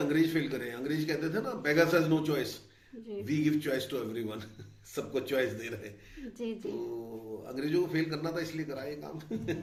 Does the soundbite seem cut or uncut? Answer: uncut